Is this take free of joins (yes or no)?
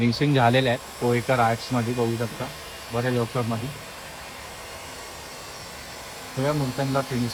yes